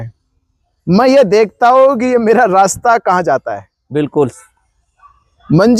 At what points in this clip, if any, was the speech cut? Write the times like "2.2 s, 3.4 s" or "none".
none